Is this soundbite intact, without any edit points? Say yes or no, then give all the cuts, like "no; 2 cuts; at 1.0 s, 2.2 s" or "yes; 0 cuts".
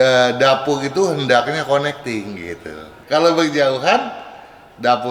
no; 1 cut; at 2.9 s